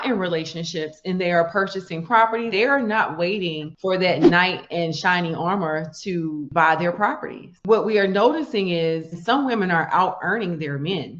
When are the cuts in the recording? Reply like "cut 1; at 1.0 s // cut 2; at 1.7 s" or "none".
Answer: none